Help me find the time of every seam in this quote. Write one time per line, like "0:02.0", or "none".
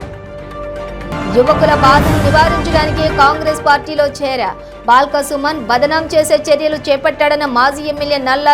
0:01.0